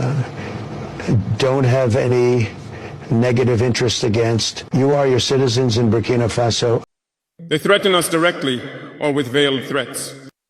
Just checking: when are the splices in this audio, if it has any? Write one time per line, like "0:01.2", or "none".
0:06.8

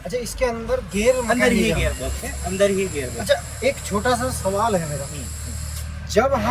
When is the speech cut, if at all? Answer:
none

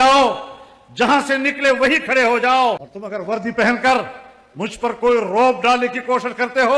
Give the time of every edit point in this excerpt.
0:02.9

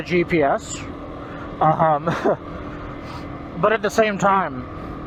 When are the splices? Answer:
none

